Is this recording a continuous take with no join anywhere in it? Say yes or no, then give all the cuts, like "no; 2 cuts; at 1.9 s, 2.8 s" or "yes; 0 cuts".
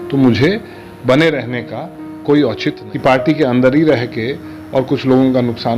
no; 1 cut; at 2.9 s